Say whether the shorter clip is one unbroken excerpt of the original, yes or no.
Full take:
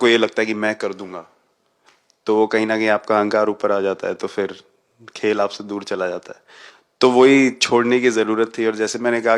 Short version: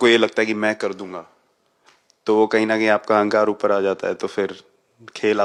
yes